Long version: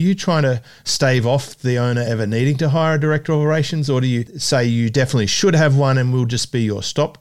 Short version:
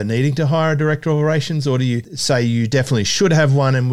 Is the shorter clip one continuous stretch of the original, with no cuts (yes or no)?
yes